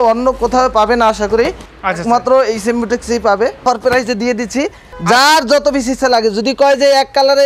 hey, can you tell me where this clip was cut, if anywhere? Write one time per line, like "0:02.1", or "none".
0:03.6
0:04.9